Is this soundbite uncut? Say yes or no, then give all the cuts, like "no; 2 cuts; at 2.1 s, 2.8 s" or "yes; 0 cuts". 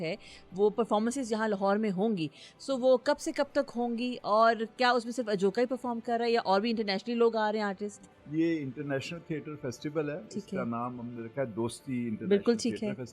yes; 0 cuts